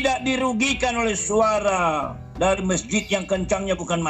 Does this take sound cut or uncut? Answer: uncut